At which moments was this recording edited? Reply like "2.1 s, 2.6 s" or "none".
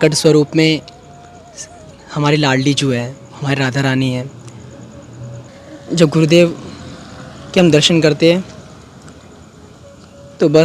5.5 s